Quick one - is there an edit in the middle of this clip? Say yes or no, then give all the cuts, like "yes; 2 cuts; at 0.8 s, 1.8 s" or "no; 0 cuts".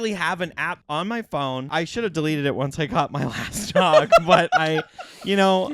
yes; 2 cuts; at 0.8 s, 1.7 s